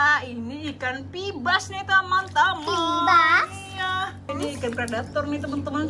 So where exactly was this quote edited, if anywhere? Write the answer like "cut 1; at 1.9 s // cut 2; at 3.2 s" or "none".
cut 1; at 4.3 s

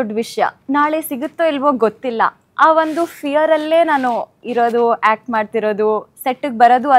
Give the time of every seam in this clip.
none

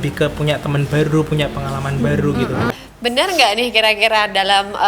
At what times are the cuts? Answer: cut 1; at 2.7 s

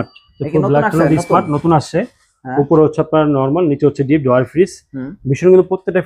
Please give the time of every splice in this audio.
none

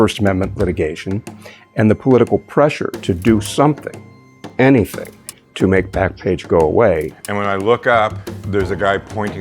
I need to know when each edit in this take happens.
cut 1; at 7.1 s // cut 2; at 8.3 s

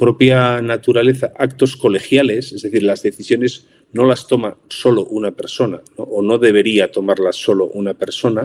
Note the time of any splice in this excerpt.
none

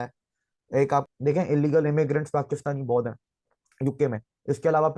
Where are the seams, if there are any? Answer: cut 1; at 1.0 s

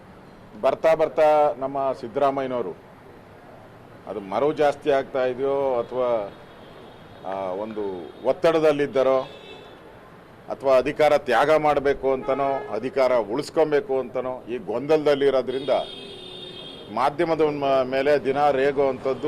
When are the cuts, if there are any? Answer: none

